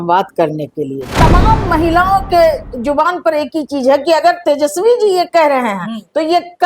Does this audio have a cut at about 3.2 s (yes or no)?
no